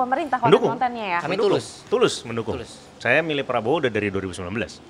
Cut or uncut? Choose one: uncut